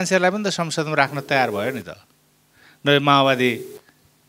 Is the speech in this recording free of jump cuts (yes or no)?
yes